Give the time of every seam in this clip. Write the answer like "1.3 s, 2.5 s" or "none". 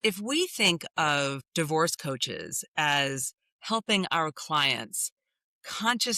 1.4 s